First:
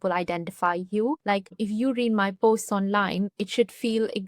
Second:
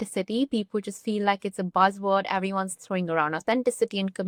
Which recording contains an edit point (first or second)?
first